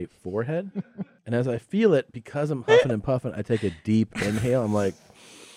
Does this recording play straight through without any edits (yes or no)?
no